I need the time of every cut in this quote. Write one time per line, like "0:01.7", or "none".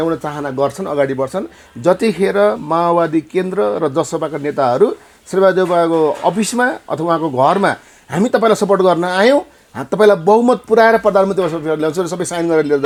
none

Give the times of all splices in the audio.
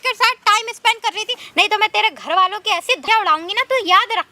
0:01.4
0:03.0

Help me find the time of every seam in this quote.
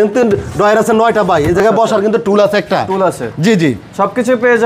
none

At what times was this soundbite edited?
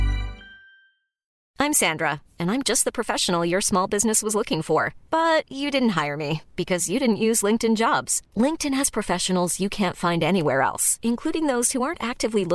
0:01.5

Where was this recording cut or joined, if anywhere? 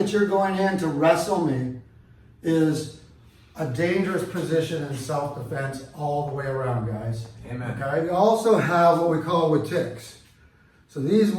0:08.0

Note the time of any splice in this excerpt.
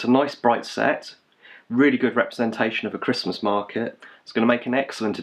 none

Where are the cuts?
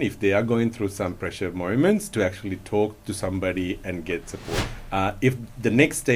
0:04.5

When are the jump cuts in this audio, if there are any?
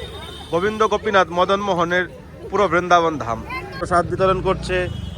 0:03.8

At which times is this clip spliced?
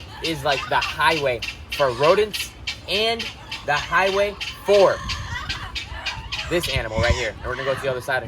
none

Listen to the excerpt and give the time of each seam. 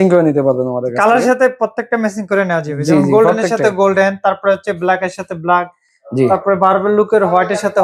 none

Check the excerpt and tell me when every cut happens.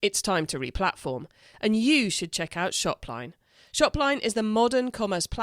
none

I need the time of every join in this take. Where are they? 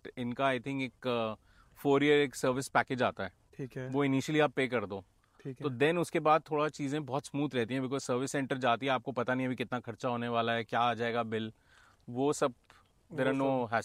none

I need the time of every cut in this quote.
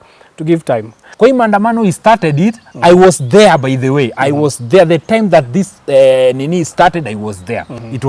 0:01.0

